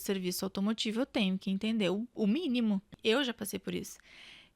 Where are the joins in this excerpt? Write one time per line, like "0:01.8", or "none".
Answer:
0:02.9